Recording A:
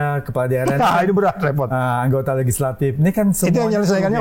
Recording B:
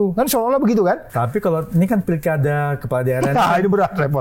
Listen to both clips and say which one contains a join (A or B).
B